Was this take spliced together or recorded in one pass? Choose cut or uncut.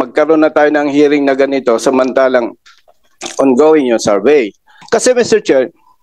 cut